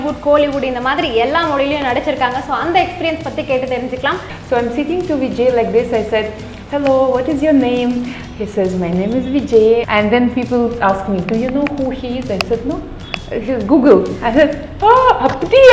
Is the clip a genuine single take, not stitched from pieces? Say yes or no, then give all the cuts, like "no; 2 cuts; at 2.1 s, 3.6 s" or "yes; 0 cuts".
no; 2 cuts; at 4.3 s, 9.9 s